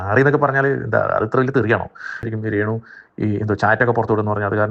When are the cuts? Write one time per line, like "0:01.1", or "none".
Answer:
0:02.3